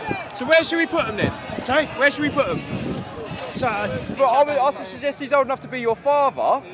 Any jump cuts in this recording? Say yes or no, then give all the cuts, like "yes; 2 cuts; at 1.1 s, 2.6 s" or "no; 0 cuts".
yes; 1 cut; at 4.2 s